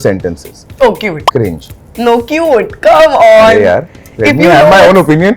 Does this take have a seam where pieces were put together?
no; 0 cuts

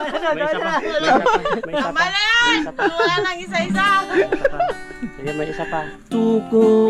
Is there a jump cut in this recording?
no; 0 cuts

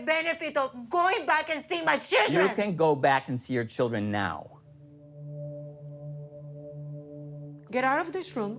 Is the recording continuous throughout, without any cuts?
no; 2 cuts; at 5.1 s, 7.6 s

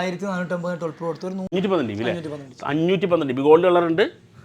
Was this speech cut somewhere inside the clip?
yes; 1 cut; at 1.5 s

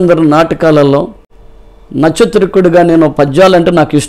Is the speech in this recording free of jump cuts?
yes; 0 cuts

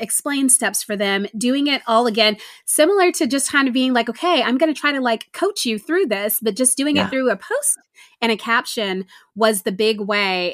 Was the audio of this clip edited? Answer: no; 0 cuts

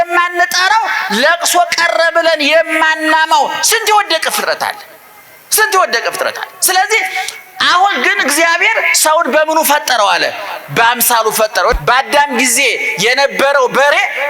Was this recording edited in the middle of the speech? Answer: yes; 1 cut; at 11.8 s

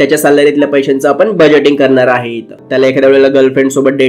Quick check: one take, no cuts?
no; 1 cut; at 2.6 s

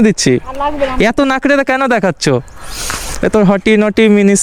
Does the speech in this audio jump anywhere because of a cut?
no; 0 cuts

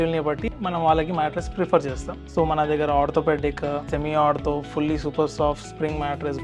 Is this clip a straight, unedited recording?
no; 2 cuts; at 2.1 s, 3.9 s

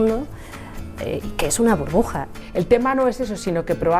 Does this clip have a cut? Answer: yes; 1 cut; at 2.4 s

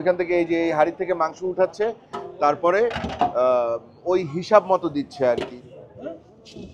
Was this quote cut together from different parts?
yes; 1 cut; at 5.5 s

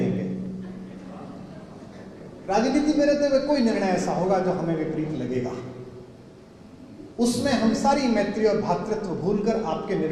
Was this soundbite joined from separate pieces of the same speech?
no; 0 cuts

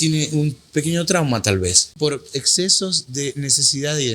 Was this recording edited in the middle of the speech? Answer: yes; 1 cut; at 1.8 s

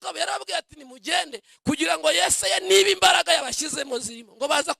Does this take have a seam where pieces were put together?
no; 0 cuts

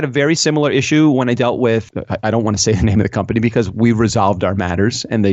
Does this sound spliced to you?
yes; 1 cut; at 1.9 s

